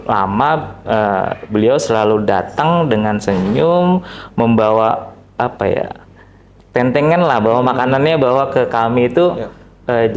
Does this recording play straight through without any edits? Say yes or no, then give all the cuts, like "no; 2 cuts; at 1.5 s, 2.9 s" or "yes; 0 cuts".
yes; 0 cuts